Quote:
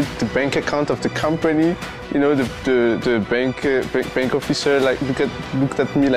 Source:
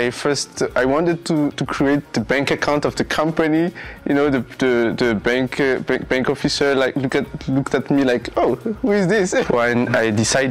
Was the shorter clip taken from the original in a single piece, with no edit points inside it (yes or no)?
yes